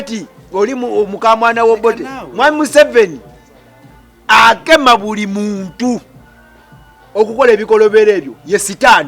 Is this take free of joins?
yes; 0 cuts

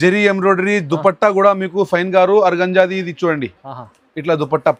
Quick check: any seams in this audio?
no; 0 cuts

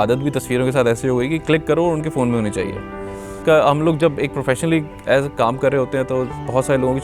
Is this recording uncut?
no; 1 cut; at 3.4 s

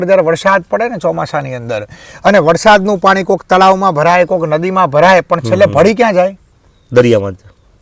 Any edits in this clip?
no; 0 cuts

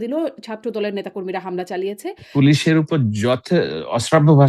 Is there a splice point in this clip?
yes; 1 cut; at 2.2 s

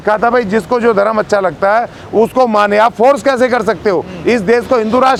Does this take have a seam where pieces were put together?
no; 0 cuts

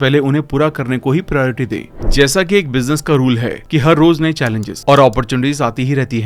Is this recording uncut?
no; 1 cut; at 1.9 s

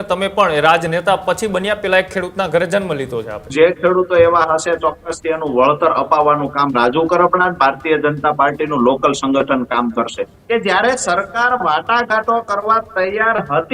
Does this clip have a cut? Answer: yes; 2 cuts; at 3.5 s, 10.3 s

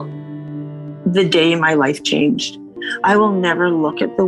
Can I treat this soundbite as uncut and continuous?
yes; 0 cuts

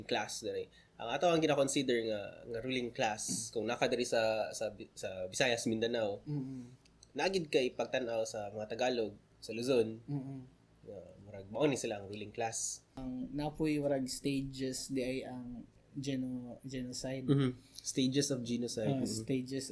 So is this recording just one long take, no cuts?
no; 1 cut; at 13.0 s

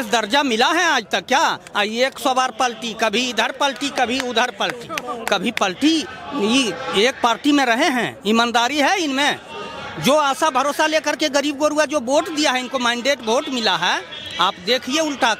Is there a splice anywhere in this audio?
no; 0 cuts

